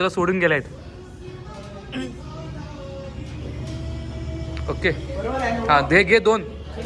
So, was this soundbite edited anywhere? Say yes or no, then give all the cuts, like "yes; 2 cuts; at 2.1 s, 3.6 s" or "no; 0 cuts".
no; 0 cuts